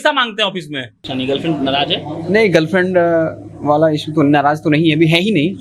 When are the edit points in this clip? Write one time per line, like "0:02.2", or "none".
0:01.0